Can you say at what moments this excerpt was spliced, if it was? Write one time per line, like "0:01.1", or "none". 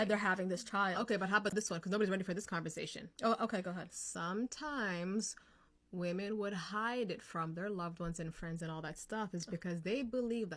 none